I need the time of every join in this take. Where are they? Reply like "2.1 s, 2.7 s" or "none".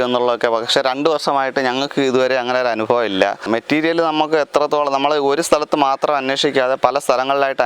3.4 s